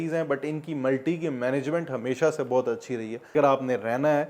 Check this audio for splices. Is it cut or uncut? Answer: cut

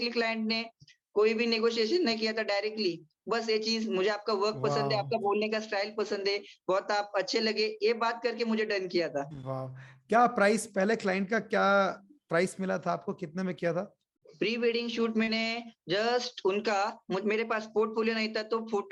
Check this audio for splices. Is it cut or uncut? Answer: uncut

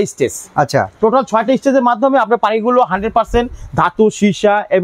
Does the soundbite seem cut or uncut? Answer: uncut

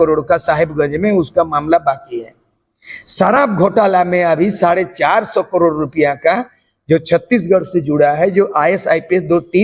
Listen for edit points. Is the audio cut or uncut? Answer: uncut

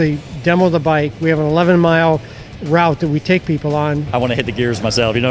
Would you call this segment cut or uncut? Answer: cut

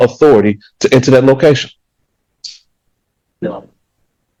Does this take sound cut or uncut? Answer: uncut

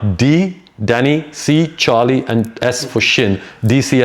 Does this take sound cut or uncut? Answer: uncut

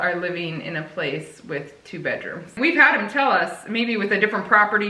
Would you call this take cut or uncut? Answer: cut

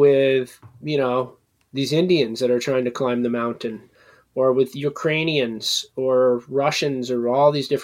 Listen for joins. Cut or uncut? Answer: uncut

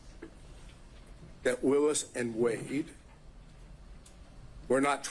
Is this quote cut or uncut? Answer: cut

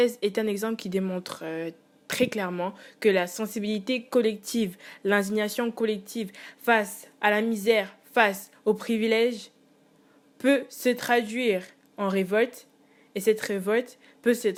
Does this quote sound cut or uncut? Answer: uncut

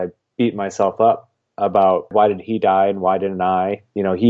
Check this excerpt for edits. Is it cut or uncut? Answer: cut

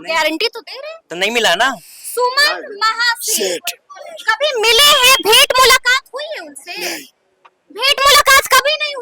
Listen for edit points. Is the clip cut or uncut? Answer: cut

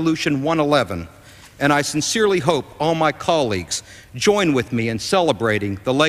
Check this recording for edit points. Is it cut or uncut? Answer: cut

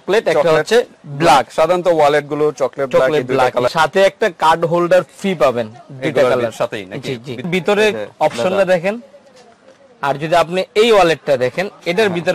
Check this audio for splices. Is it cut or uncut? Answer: cut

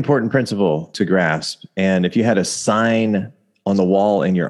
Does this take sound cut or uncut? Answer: cut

